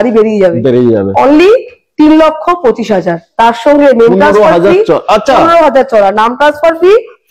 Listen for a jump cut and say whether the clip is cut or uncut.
uncut